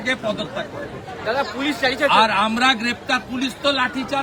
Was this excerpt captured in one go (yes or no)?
yes